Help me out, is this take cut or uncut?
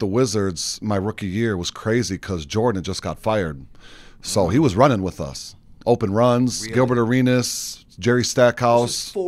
uncut